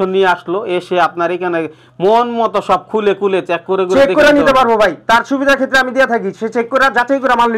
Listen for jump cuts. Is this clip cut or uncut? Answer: uncut